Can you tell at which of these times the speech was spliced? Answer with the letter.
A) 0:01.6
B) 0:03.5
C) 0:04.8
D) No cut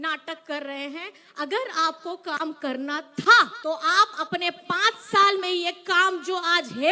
B